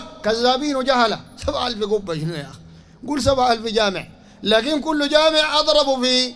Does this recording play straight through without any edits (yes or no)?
yes